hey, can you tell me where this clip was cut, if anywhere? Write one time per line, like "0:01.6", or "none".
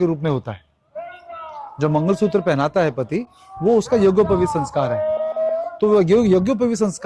none